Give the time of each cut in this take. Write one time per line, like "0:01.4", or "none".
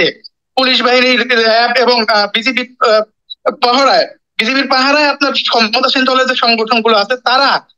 none